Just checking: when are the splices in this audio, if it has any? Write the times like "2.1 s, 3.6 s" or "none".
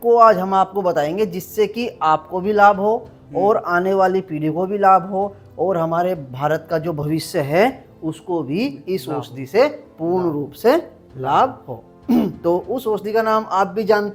none